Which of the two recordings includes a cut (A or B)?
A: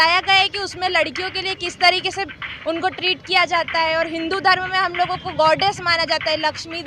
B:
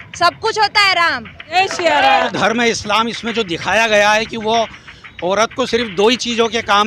B